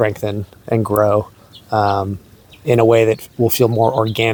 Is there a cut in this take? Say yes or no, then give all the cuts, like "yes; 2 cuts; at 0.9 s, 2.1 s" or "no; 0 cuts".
no; 0 cuts